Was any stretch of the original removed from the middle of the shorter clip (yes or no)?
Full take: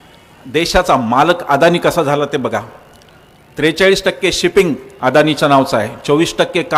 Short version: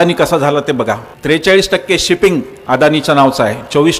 yes